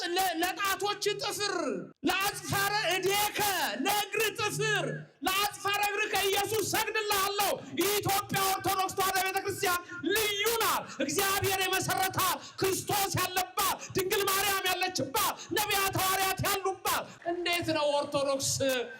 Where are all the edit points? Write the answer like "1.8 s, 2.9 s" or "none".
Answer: 1.9 s, 17.1 s